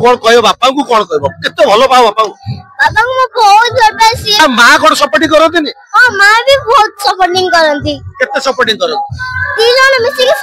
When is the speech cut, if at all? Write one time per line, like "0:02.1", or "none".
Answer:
0:04.4